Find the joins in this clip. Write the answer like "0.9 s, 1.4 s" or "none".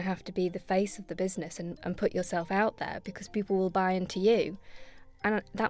none

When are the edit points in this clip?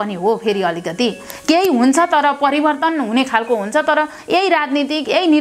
none

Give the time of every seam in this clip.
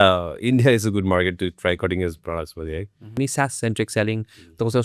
3.1 s

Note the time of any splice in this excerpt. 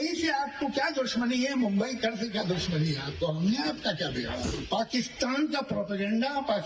4.6 s

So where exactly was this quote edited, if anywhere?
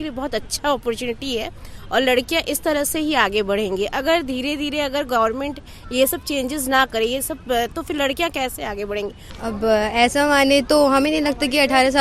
9.3 s

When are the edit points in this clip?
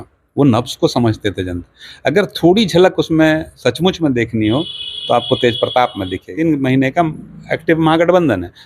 6.3 s

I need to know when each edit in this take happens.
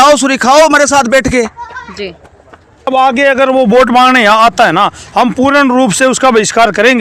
2.9 s

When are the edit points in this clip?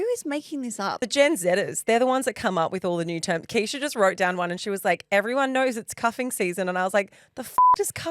1.1 s

